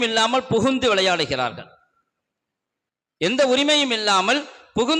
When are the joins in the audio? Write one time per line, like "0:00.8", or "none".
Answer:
none